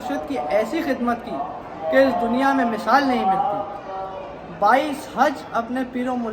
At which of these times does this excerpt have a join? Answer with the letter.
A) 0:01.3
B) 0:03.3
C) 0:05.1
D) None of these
D